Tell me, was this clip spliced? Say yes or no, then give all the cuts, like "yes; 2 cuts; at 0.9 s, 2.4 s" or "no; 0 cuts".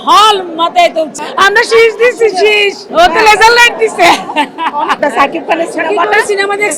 yes; 2 cuts; at 1.1 s, 5.0 s